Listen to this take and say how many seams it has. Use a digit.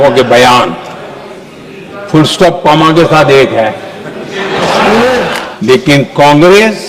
1